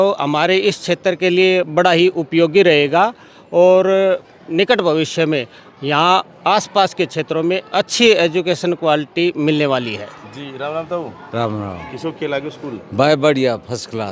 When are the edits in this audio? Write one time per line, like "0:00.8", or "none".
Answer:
none